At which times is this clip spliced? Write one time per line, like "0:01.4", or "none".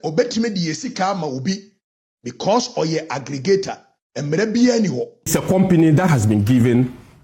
0:05.1